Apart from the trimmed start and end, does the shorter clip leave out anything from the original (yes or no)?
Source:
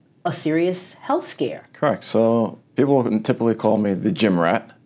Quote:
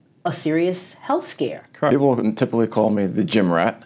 yes